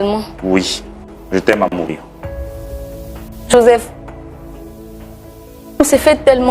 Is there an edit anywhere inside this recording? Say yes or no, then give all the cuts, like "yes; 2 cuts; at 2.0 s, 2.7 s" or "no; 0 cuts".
yes; 2 cuts; at 2.0 s, 3.5 s